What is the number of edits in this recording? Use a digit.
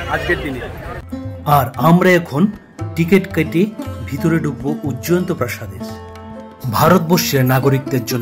0